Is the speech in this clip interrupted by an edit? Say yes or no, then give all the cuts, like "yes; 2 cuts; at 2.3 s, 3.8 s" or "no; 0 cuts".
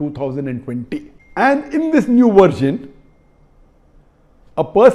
yes; 1 cut; at 1.2 s